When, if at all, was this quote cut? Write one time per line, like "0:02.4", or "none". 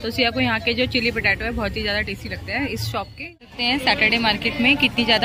0:03.6